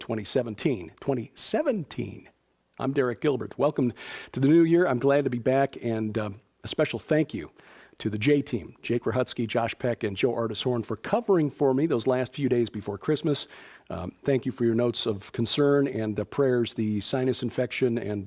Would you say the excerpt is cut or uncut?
cut